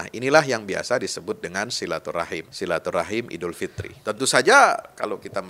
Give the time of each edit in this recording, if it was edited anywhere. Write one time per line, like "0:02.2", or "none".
0:02.5
0:03.9